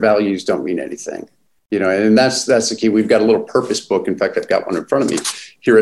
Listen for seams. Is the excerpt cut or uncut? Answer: uncut